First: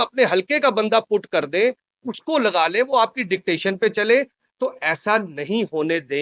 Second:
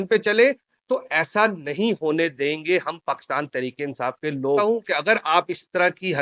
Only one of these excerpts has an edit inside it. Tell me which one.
second; 1 cut; at 4.6 s

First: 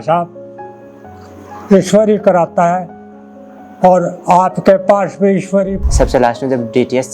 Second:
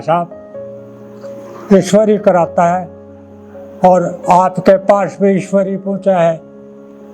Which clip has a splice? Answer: first; 1 cut; at 5.8 s

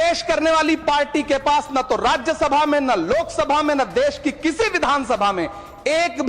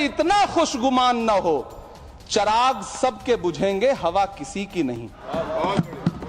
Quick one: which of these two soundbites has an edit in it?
second; 1 cut; at 5.2 s

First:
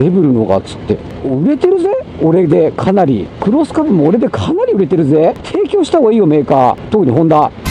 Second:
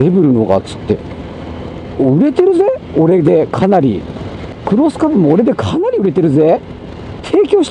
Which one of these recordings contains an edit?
first; 4 cuts; at 1.1 s, 3.3 s, 5.4 s, 6.8 s

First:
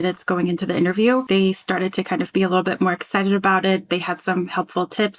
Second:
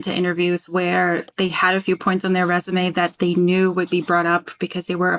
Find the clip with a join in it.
first; 1 cut; at 1.2 s

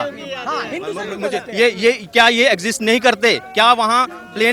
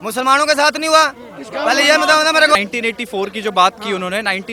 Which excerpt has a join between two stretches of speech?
second; 1 cut; at 2.5 s

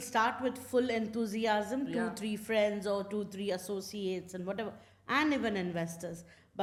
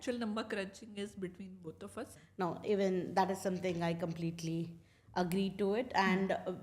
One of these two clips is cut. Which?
second; 1 cut; at 2.2 s

